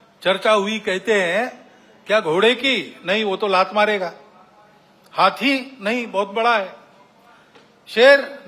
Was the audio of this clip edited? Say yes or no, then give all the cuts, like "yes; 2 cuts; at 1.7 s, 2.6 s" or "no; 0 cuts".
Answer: no; 0 cuts